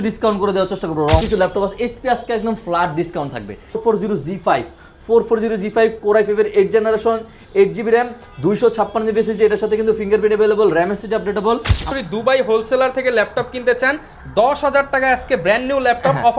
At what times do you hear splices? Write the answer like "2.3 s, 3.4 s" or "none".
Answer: 1.2 s, 3.8 s, 11.9 s